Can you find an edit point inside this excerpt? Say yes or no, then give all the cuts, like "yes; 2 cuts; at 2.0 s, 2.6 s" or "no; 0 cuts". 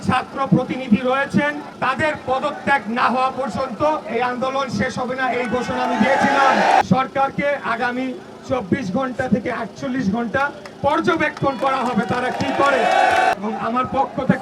yes; 3 cuts; at 1.7 s, 6.8 s, 13.3 s